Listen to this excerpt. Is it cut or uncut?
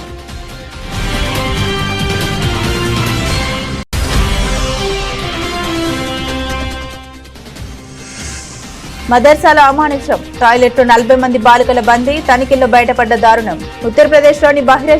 cut